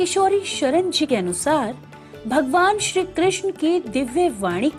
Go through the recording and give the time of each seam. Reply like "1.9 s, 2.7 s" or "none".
1.0 s